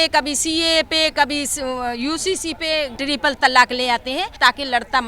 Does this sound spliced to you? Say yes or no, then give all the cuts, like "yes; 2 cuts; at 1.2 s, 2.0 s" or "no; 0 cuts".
yes; 2 cuts; at 2.9 s, 4.3 s